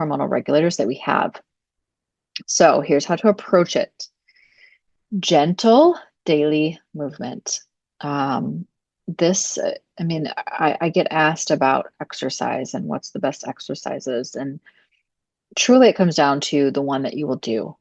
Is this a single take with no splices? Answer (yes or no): yes